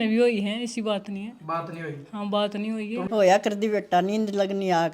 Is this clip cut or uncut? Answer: cut